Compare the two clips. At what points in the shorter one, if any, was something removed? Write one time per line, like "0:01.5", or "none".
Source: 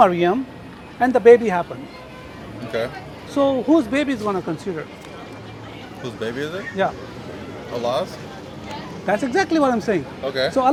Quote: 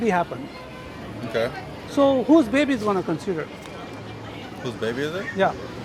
none